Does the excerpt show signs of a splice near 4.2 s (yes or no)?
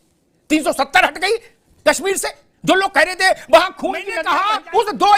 yes